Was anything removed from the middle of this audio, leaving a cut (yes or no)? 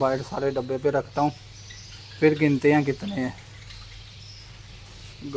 no